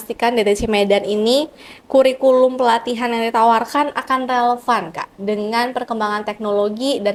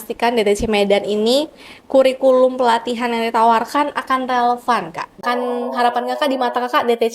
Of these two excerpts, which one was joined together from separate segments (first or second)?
second